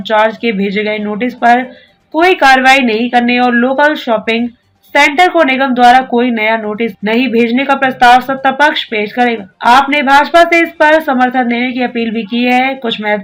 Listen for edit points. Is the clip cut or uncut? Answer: uncut